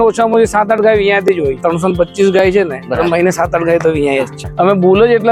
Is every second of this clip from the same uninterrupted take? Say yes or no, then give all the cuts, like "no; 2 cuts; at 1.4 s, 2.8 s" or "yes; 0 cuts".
no; 2 cuts; at 1.6 s, 4.4 s